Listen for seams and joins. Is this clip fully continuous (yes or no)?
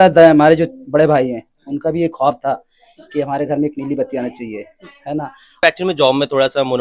no